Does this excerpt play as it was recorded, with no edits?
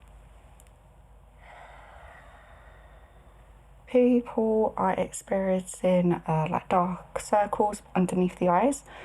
no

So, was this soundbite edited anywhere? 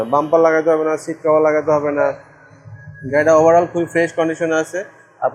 no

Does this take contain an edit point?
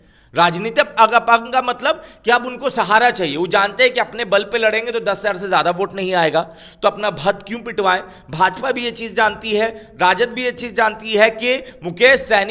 no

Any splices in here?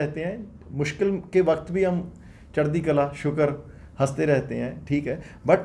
no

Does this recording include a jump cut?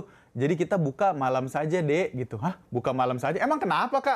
no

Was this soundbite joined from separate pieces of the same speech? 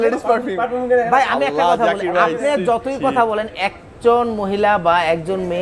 no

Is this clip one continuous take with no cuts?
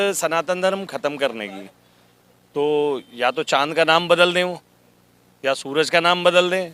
yes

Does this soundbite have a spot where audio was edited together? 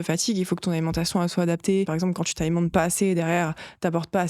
yes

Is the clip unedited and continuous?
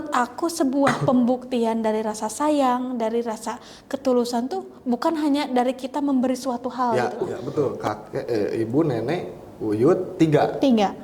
no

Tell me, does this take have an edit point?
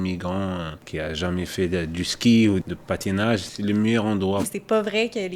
yes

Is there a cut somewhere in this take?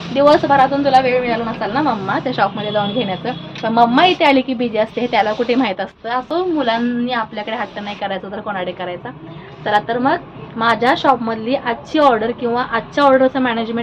no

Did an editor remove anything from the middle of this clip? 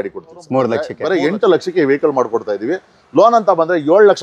yes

